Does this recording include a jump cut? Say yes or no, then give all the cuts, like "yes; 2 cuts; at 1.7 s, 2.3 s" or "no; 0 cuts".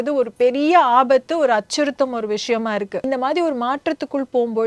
yes; 1 cut; at 3.1 s